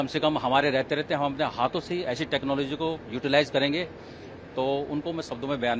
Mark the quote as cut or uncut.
uncut